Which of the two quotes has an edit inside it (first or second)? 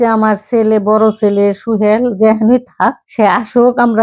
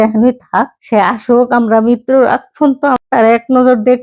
second